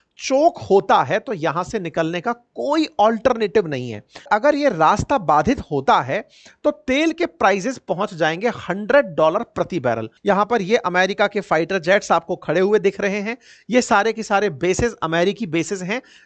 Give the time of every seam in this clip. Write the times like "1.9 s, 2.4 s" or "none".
4.3 s, 10.1 s